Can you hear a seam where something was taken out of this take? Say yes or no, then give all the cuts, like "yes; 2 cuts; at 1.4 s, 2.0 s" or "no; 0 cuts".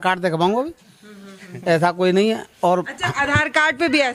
no; 0 cuts